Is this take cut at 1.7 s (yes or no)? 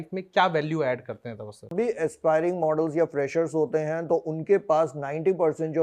yes